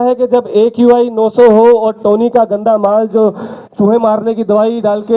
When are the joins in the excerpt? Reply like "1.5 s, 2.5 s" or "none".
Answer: none